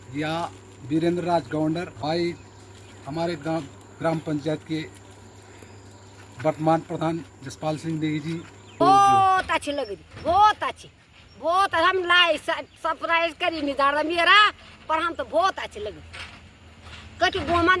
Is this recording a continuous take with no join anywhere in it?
no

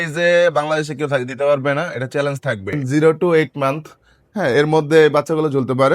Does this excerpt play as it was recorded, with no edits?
no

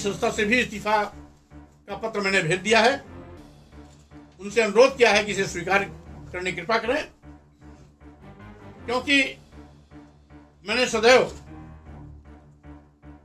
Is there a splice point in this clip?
no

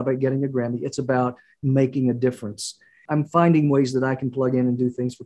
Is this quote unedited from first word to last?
no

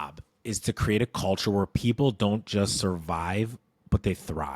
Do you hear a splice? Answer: no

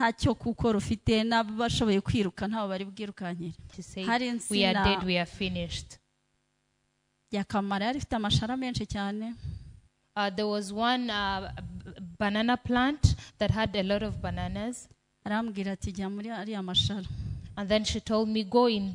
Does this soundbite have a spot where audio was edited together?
yes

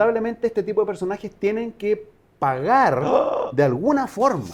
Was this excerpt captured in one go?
yes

